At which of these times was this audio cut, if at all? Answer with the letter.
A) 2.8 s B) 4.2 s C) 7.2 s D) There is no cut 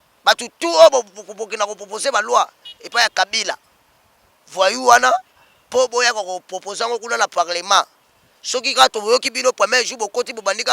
D